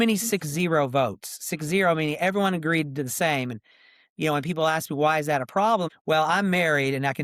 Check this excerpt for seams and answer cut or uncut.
cut